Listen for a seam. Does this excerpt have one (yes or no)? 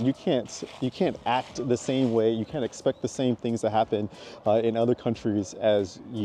no